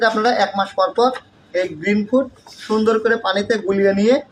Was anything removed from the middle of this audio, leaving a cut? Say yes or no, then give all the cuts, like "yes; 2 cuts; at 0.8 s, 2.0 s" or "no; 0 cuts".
no; 0 cuts